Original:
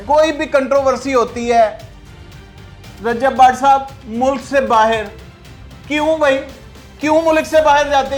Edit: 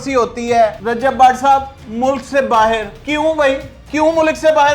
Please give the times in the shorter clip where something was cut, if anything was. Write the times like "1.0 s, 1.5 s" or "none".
0.8 s, 2.9 s, 3.7 s